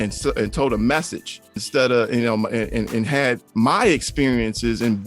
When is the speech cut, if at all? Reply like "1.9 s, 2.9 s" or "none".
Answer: 1.6 s, 3.4 s